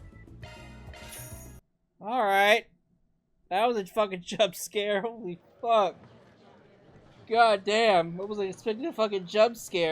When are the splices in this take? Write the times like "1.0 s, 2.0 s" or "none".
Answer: 1.6 s